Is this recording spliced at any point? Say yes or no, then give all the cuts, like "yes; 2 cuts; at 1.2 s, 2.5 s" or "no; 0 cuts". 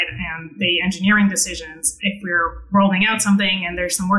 no; 0 cuts